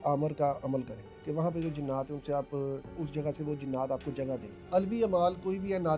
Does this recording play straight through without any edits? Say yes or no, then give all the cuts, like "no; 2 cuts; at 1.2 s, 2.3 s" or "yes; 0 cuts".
no; 3 cuts; at 1.0 s, 2.9 s, 4.7 s